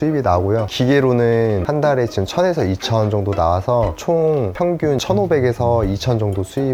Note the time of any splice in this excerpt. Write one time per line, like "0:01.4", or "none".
none